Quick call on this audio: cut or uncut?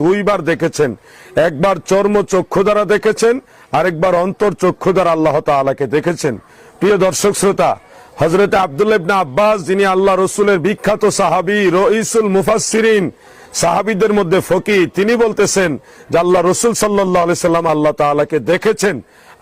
uncut